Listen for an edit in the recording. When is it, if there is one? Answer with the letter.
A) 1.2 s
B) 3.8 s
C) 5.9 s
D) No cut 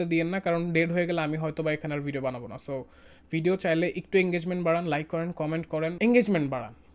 C